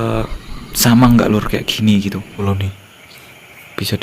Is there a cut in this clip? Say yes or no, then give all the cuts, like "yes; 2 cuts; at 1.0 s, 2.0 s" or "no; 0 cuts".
yes; 1 cut; at 2.4 s